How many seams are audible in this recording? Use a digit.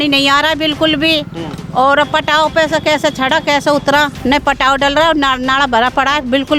0